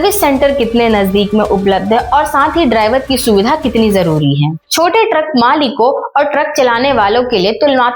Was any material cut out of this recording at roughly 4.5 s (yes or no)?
yes